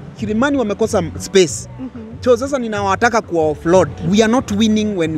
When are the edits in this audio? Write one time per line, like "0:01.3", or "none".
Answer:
0:04.0